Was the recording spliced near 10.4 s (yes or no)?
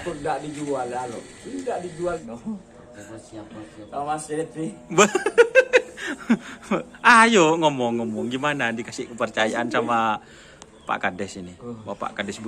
no